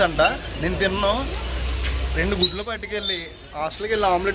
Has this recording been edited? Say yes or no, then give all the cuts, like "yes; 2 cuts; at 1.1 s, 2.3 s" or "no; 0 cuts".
no; 0 cuts